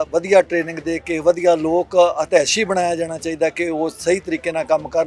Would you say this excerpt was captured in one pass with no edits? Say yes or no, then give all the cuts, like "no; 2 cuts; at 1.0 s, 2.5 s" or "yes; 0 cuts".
yes; 0 cuts